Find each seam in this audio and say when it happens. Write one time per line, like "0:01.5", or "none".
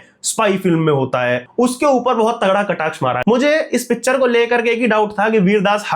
0:01.5
0:03.2